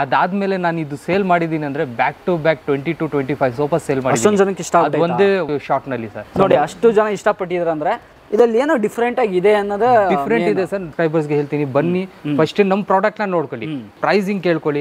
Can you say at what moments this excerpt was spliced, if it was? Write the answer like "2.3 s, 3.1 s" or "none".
5.7 s, 10.9 s, 13.9 s